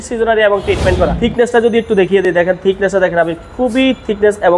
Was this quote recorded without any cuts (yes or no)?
no